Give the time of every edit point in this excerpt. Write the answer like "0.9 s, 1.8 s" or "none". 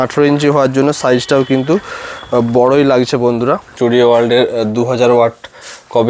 3.7 s